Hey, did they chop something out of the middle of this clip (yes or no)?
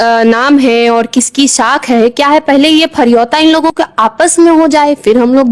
no